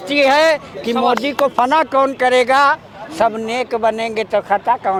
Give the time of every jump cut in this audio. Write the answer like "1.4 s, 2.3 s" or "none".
none